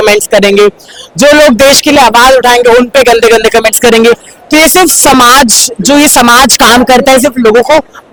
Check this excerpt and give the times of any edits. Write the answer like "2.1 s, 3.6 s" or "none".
none